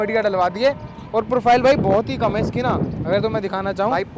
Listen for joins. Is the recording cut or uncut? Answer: uncut